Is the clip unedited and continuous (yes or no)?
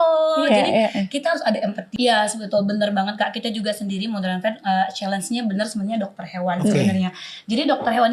no